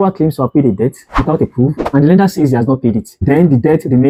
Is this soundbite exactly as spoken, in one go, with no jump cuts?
yes; 0 cuts

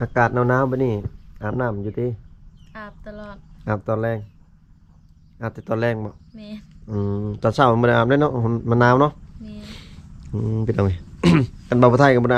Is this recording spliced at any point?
no; 0 cuts

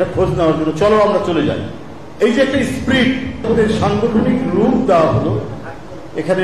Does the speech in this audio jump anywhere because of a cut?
yes; 1 cut; at 3.4 s

